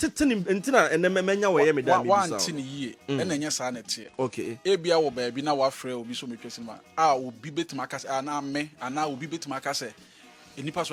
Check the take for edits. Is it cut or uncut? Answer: uncut